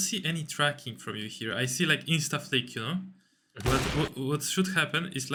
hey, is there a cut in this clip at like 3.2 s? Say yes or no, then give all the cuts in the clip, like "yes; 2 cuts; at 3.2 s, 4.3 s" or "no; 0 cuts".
no; 0 cuts